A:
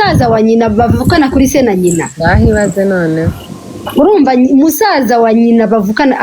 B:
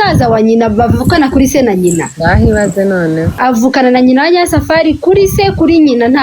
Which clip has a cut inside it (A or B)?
B